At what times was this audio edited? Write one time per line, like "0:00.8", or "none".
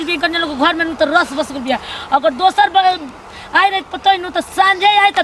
none